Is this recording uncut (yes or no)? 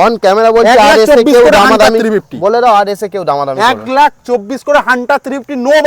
yes